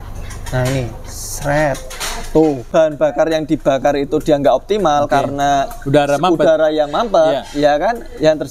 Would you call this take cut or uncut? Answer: cut